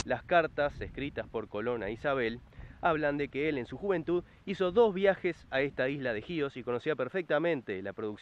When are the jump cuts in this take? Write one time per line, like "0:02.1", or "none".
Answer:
none

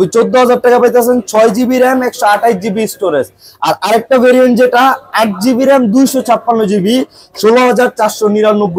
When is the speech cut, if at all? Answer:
none

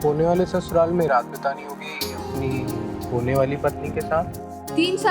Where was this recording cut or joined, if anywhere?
none

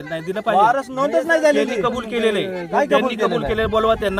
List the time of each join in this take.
0:01.7

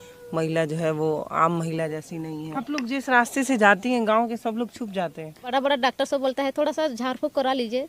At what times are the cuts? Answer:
0:02.6
0:05.5

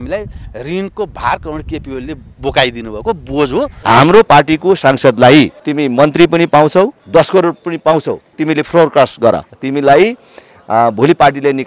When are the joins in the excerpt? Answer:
0:03.7
0:05.6
0:07.0
0:08.3
0:09.5

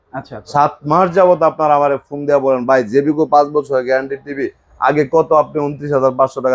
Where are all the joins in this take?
none

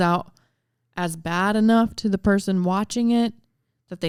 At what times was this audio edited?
none

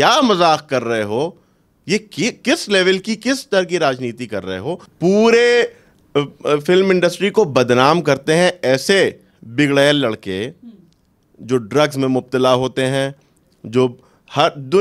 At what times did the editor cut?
0:04.9

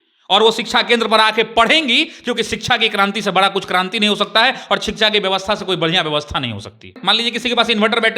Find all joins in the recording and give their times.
0:06.9

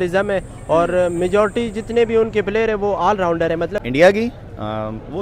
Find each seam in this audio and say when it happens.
none

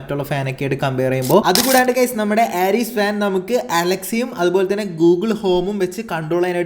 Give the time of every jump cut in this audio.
0:01.4

